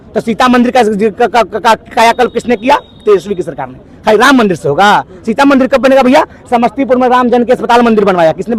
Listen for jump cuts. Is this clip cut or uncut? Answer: uncut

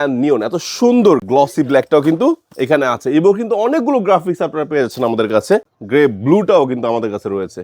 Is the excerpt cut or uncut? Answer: cut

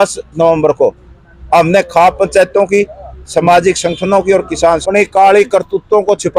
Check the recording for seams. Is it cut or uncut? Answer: cut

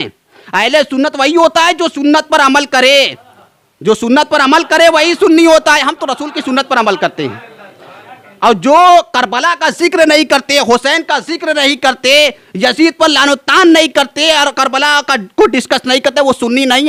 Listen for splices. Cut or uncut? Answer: uncut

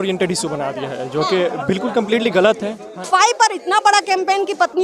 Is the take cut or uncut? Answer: cut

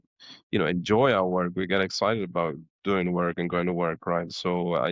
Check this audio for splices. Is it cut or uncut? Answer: uncut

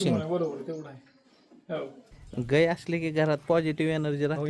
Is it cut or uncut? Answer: cut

